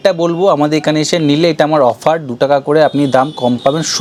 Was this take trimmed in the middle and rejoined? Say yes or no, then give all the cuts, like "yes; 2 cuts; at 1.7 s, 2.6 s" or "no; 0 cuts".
no; 0 cuts